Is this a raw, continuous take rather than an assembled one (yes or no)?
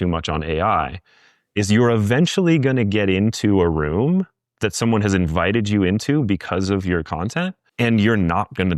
no